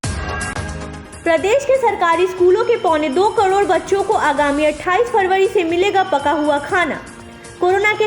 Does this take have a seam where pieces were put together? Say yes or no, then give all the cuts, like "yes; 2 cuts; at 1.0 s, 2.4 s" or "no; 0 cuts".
yes; 1 cut; at 1.0 s